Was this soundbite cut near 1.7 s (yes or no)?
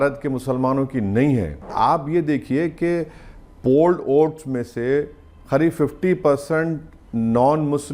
yes